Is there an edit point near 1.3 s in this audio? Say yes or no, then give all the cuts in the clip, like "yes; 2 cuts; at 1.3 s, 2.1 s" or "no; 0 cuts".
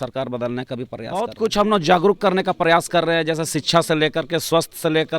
yes; 1 cut; at 1.3 s